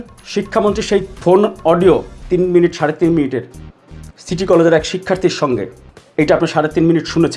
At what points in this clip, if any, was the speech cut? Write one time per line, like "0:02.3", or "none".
0:01.1
0:02.1